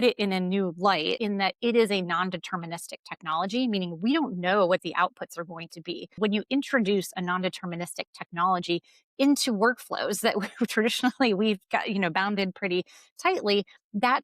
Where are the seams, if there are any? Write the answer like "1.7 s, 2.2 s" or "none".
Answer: 1.2 s, 6.1 s